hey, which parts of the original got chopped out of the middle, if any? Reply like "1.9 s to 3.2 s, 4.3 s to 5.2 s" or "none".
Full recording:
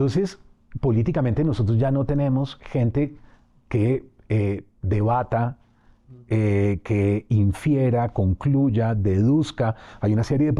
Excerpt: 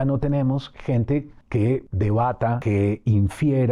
3.6 s to 4.7 s, 5.5 s to 6.8 s

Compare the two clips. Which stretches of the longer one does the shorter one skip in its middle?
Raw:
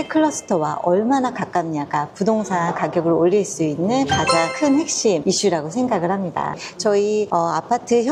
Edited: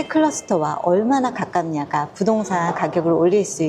none

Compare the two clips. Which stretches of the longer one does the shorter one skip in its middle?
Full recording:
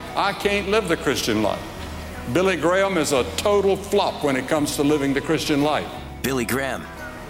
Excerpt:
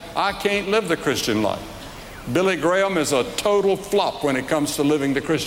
none

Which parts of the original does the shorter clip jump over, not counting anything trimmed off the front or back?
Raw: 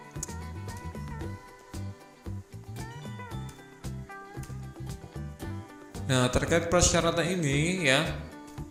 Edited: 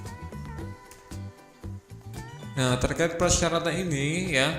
3.2 s to 6.1 s

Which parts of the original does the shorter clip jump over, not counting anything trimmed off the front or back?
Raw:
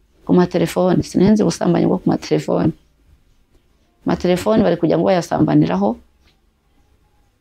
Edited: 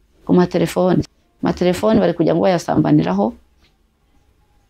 1.1 s to 3.7 s

